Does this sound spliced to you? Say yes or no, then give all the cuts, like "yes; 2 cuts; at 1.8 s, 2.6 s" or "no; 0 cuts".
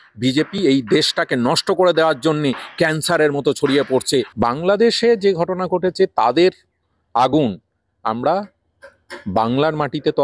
yes; 1 cut; at 4.3 s